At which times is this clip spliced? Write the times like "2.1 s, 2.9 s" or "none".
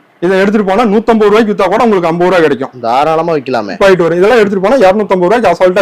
3.8 s